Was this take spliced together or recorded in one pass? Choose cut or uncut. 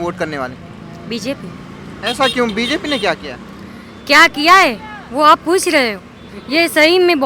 uncut